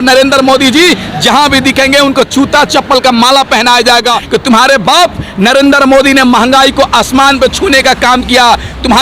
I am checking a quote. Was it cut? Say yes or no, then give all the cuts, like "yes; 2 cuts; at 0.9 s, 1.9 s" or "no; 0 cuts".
yes; 1 cut; at 4.2 s